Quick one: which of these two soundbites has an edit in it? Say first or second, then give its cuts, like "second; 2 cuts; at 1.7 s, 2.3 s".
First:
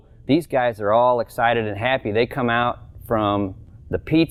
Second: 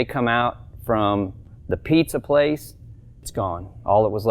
second; 1 cut; at 3.3 s